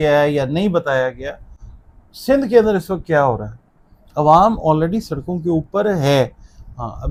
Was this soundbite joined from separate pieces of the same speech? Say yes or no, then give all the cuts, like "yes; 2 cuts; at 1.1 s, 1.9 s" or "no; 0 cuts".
no; 0 cuts